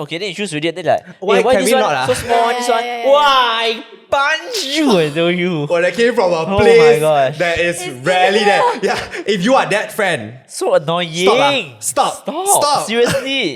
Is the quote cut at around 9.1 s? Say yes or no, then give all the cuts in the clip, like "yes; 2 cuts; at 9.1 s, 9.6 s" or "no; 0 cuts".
yes; 1 cut; at 9.1 s